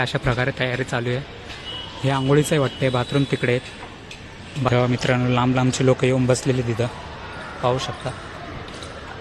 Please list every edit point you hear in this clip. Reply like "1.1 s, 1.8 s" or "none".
4.7 s